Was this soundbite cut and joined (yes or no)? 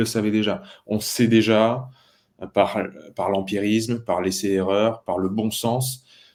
no